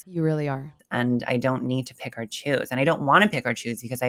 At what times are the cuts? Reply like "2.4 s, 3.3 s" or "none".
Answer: none